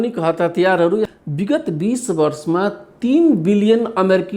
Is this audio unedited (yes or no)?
no